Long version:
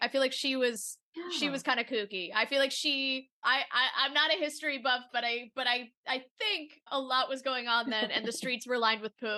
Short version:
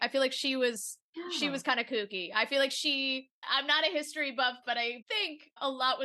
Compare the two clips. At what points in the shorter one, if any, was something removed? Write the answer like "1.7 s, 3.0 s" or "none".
3.4 s, 5.0 s